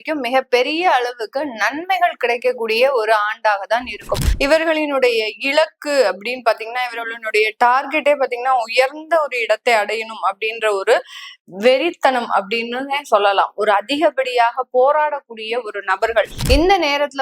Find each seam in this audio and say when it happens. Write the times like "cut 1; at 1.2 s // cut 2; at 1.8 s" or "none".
cut 1; at 4.2 s // cut 2; at 16.4 s

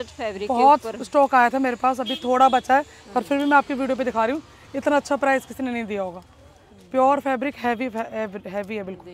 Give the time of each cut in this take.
none

